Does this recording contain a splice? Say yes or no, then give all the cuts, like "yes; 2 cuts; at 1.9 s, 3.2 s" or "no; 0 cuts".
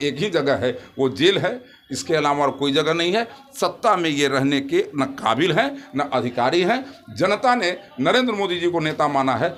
no; 0 cuts